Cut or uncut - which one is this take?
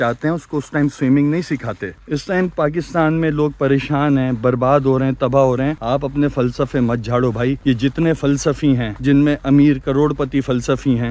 uncut